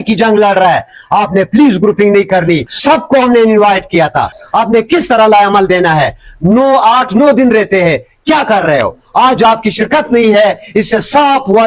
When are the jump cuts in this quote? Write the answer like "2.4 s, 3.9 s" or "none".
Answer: 2.7 s, 4.4 s